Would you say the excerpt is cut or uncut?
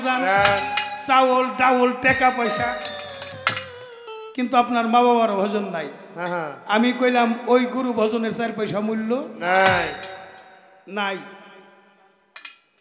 uncut